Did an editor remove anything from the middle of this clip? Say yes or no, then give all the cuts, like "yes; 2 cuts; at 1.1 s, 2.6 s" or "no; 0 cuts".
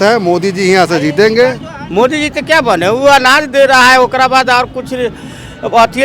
yes; 1 cut; at 1.7 s